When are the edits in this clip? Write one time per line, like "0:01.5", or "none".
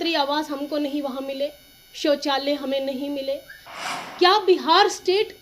0:03.7